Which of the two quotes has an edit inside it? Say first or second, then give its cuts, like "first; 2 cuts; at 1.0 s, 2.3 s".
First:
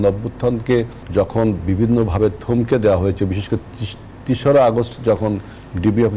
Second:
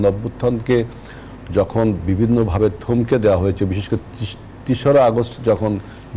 first; 1 cut; at 1.0 s